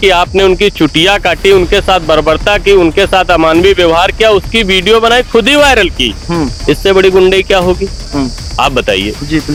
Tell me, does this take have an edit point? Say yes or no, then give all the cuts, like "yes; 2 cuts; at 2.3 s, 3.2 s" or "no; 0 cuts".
no; 0 cuts